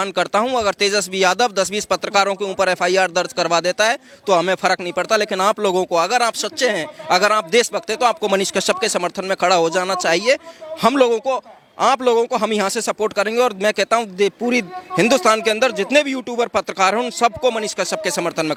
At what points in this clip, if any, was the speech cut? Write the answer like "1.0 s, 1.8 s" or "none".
none